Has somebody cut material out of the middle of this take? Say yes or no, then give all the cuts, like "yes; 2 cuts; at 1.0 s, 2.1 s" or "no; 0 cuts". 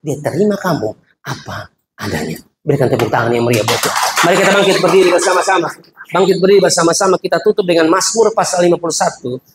no; 0 cuts